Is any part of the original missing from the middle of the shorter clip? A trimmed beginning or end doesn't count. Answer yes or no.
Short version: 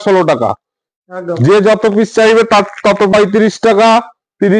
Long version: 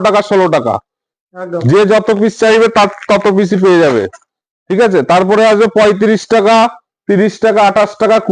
yes